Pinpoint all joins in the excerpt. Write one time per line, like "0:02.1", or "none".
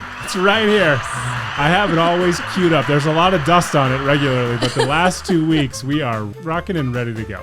0:06.4